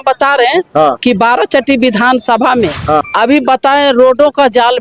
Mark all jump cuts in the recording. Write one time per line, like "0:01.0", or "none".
0:03.1